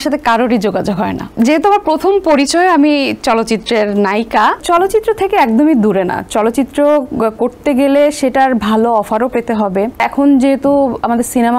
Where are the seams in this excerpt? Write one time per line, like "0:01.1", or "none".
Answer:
0:01.2
0:04.6
0:10.1